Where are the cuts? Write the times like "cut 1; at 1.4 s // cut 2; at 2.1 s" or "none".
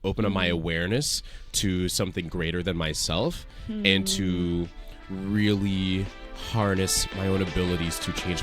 cut 1; at 7.0 s